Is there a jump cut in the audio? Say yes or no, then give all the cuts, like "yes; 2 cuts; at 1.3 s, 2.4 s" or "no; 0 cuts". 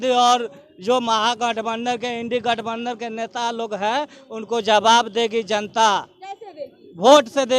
no; 0 cuts